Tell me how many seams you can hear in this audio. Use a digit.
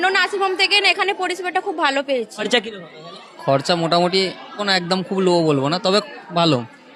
0